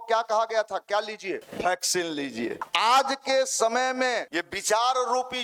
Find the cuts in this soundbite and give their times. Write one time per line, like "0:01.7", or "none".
0:01.5
0:02.6
0:04.3